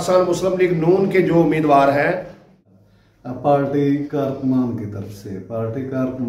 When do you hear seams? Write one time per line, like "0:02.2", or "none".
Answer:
0:02.5